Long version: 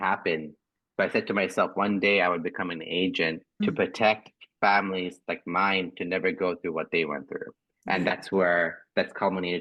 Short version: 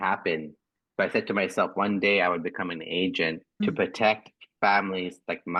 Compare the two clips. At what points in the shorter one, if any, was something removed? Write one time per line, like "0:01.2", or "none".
none